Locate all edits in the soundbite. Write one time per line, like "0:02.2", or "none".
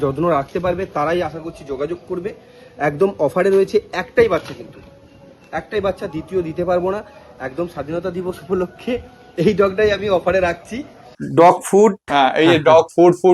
none